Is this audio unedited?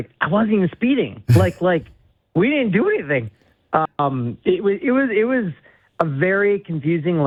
yes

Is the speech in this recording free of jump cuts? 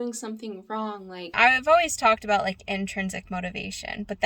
no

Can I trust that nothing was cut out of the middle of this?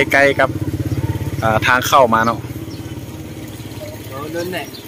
yes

